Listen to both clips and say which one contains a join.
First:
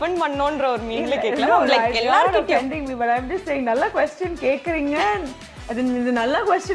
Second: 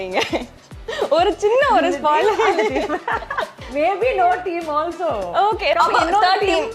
second; 2 cuts; at 3.6 s, 5.8 s

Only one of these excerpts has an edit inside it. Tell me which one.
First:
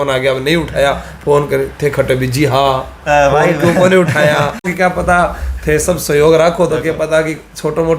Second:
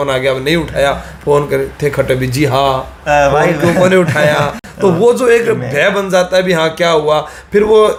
first; 1 cut; at 4.7 s

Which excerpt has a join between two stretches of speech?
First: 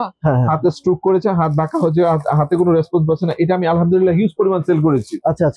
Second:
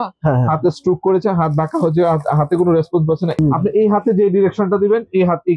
second; 1 cut; at 3.4 s

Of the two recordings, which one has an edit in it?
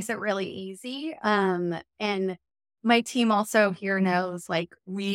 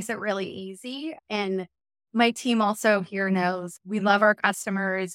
second; 2 cuts; at 1.2 s, 3.7 s

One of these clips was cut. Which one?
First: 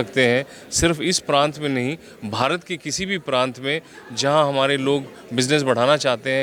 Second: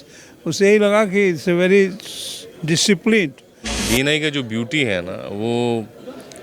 second; 1 cut; at 3.8 s

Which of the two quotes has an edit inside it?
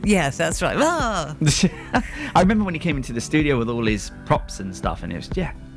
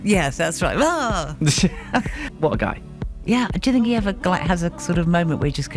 second; 1 cut; at 2.2 s

